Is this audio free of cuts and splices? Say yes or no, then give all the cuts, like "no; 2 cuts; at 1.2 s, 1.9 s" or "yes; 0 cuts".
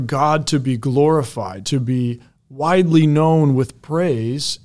yes; 0 cuts